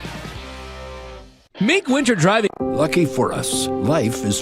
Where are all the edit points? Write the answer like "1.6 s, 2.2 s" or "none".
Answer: 1.9 s, 2.5 s